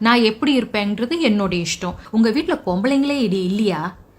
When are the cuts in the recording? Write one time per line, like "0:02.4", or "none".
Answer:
0:02.0

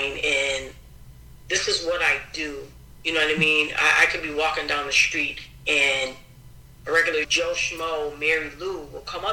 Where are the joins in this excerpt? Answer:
0:07.3

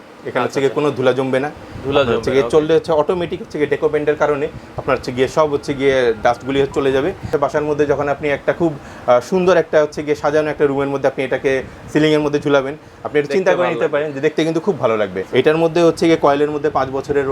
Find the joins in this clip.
0:07.3
0:15.2

